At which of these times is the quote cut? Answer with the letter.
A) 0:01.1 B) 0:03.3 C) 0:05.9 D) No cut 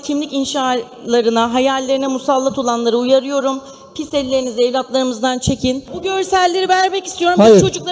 C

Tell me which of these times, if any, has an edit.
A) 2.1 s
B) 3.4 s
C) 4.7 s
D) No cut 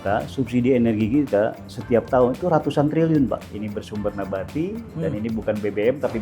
B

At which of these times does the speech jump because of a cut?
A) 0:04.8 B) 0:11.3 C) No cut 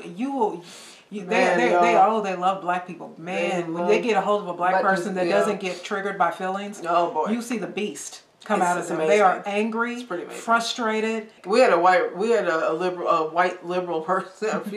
B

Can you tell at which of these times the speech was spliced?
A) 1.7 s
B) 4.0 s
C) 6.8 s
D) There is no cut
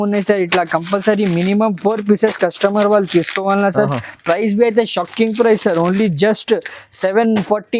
D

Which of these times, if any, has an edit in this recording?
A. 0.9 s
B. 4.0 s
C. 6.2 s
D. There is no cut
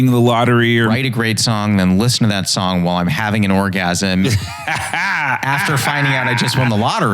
A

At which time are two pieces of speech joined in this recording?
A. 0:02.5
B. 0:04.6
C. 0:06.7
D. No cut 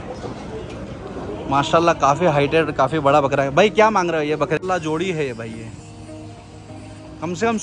B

